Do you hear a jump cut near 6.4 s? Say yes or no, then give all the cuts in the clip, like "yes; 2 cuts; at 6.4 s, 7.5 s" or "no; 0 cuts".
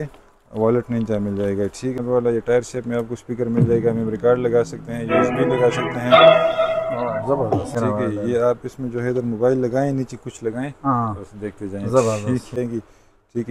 no; 3 cuts; at 2.0 s, 7.7 s, 12.6 s